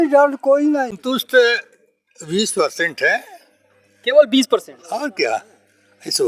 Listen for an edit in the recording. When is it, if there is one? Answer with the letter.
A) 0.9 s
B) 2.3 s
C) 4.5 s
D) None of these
A